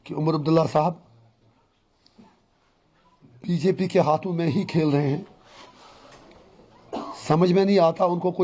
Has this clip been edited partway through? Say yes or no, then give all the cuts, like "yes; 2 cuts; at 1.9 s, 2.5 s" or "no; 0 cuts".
no; 0 cuts